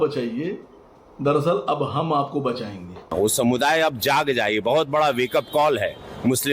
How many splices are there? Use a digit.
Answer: 1